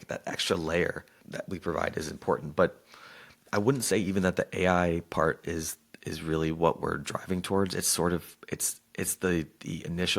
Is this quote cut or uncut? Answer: cut